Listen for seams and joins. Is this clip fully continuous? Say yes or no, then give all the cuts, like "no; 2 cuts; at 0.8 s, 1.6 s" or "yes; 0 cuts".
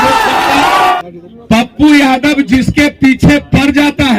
no; 1 cut; at 1.0 s